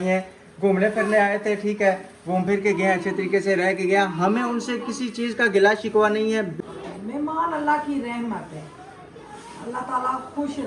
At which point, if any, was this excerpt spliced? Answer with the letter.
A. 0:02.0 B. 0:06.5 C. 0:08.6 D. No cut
B